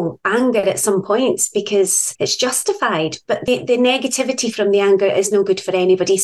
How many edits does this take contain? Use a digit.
2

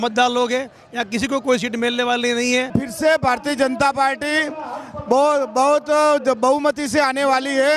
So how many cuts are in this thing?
1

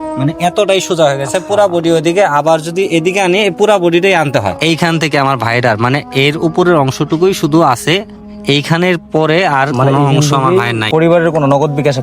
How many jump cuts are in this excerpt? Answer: 2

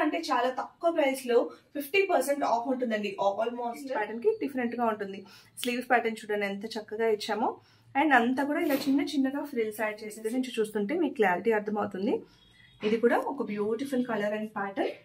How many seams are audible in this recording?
2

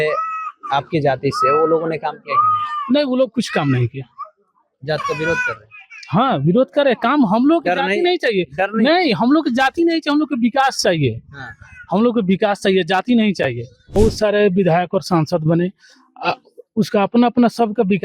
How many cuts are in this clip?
1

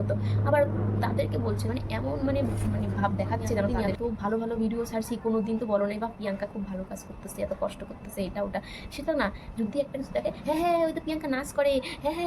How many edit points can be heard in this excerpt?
1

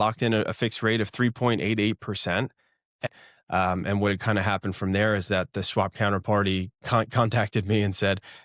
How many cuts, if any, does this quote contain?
1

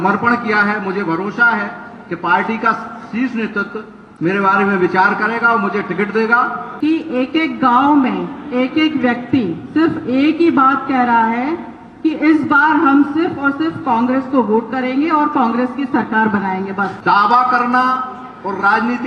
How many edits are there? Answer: 2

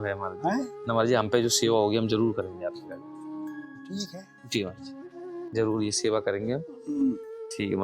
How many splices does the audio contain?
0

